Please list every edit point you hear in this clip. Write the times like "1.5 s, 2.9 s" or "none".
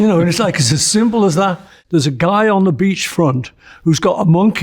1.7 s